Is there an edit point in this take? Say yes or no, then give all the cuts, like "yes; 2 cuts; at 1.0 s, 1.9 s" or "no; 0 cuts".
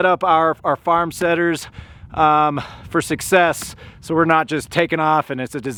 no; 0 cuts